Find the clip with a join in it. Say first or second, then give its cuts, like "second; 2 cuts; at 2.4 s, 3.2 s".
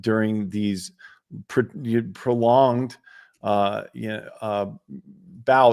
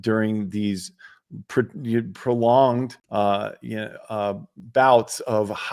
second; 2 cuts; at 3.0 s, 4.5 s